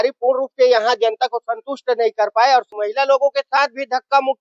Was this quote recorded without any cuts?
no; 1 cut; at 2.7 s

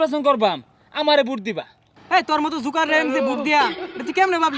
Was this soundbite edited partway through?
yes; 1 cut; at 2.0 s

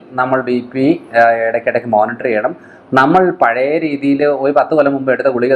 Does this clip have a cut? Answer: no; 0 cuts

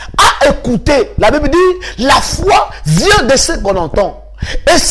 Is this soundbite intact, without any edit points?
yes; 0 cuts

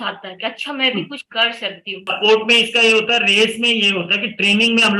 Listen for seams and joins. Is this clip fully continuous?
no; 1 cut; at 2.0 s

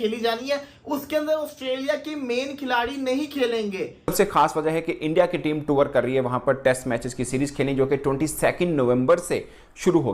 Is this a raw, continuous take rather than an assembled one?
no; 1 cut; at 4.1 s

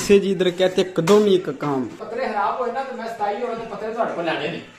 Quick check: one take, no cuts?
no; 1 cut; at 2.0 s

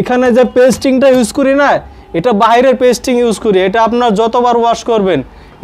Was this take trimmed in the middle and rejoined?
no; 0 cuts

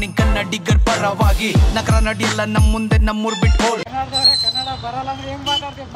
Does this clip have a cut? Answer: no; 0 cuts

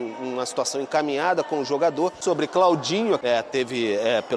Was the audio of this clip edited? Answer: yes; 2 cuts; at 2.2 s, 3.2 s

